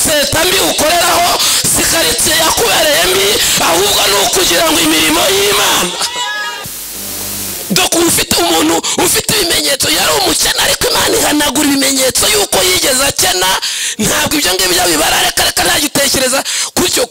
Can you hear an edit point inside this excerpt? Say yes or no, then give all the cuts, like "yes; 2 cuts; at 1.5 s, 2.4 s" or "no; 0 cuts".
yes; 1 cut; at 6.6 s